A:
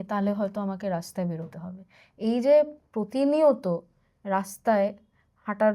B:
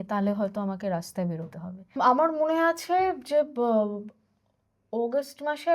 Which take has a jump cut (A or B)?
B